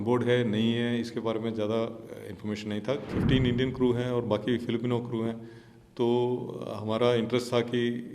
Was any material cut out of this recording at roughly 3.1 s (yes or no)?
yes